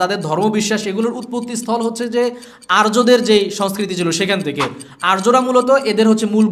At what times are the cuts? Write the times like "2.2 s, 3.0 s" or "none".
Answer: none